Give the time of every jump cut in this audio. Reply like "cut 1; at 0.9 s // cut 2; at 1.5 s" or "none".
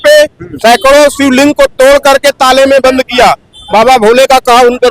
none